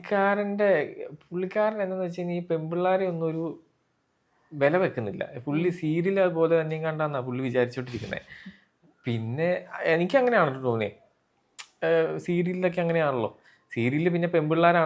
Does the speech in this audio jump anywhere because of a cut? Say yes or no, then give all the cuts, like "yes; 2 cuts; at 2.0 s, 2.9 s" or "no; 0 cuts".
no; 0 cuts